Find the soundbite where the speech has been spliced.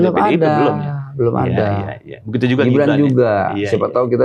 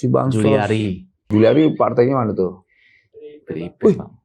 second; 1 cut; at 1.3 s

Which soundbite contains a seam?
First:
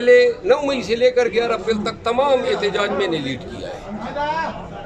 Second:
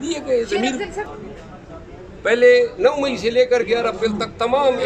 second; 1 cut; at 1.1 s

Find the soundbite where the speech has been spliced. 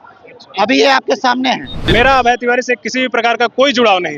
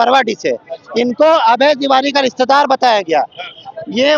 first; 1 cut; at 1.7 s

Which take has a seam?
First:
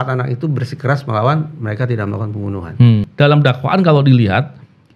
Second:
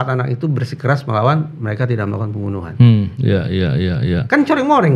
first; 1 cut; at 3.1 s

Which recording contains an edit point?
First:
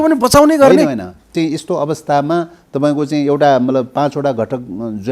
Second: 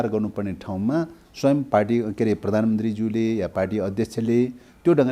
first; 1 cut; at 1.3 s

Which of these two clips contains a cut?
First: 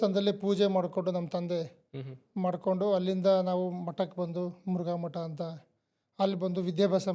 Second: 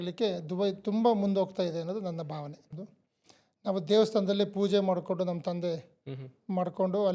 second; 1 cut; at 2.7 s

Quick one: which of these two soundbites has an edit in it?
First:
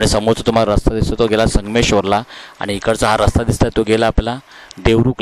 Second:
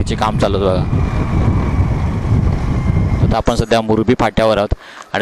second; 1 cut; at 3.3 s

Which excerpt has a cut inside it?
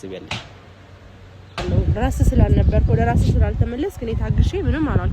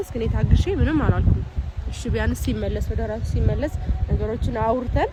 first; 1 cut; at 1.6 s

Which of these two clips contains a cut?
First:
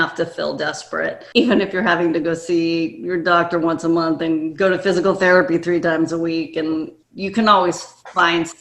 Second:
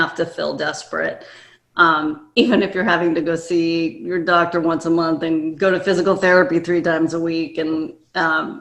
first; 2 cuts; at 1.2 s, 7.0 s

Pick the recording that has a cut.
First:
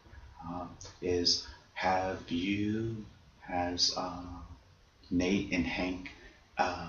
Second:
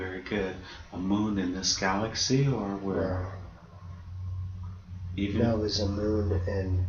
first; 1 cut; at 5.3 s

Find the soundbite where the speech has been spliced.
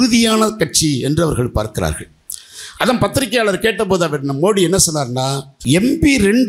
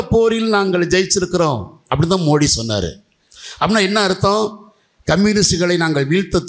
first; 1 cut; at 5.5 s

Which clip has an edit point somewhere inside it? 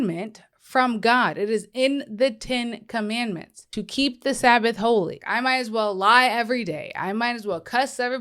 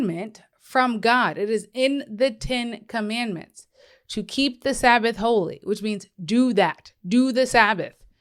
first; 2 cuts; at 3.5 s, 5.2 s

